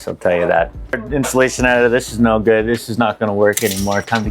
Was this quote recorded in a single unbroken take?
no; 1 cut; at 1.0 s

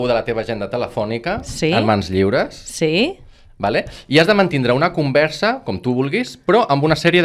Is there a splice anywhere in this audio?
no; 0 cuts

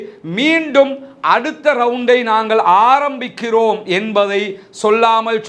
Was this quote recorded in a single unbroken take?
yes; 0 cuts

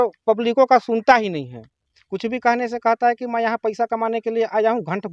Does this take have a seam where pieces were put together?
no; 0 cuts

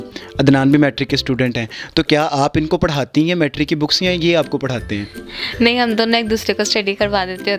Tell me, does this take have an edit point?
no; 0 cuts

